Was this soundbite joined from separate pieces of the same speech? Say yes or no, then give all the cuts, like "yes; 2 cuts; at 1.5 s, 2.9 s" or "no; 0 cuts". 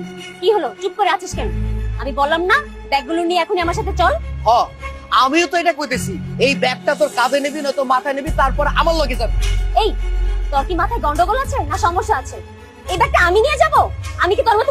yes; 1 cut; at 4.3 s